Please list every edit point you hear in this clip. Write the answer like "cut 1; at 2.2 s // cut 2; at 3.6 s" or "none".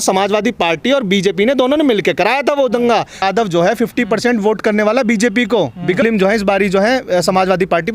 cut 1; at 3.2 s // cut 2; at 6.0 s